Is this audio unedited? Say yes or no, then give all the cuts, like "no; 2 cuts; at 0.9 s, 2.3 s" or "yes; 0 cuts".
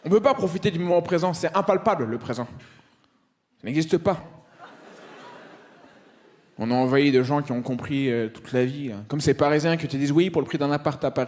no; 1 cut; at 4.2 s